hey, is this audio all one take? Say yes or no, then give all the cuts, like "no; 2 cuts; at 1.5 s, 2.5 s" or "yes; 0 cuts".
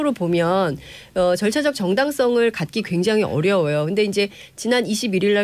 yes; 0 cuts